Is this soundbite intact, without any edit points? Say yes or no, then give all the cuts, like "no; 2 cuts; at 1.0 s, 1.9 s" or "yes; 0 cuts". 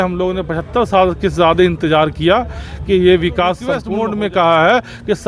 no; 1 cut; at 3.8 s